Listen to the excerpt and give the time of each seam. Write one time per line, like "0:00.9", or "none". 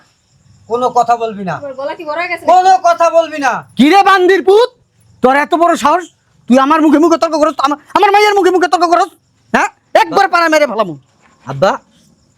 none